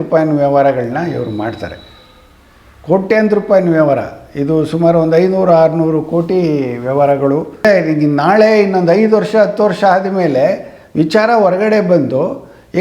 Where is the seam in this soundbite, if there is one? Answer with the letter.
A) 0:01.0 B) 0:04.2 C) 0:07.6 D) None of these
C